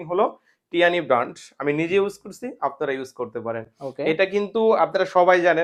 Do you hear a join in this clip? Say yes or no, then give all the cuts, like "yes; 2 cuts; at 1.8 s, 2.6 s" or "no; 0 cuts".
no; 0 cuts